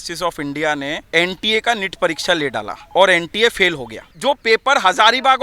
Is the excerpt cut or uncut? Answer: cut